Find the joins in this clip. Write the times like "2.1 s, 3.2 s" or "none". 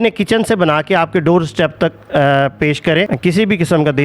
3.1 s